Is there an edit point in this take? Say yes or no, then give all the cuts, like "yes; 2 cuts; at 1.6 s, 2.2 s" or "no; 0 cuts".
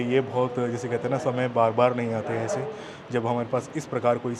no; 0 cuts